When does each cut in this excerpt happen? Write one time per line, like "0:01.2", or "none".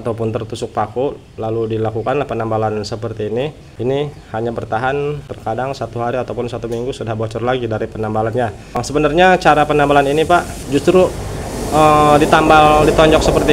0:03.6
0:05.3
0:08.8
0:10.6